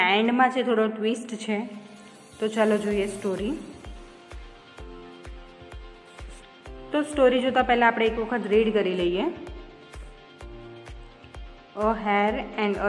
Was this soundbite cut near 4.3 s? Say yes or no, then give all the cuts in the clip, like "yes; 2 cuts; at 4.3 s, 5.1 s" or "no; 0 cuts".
yes; 4 cuts; at 4.3 s, 6.4 s, 9.6 s, 11.7 s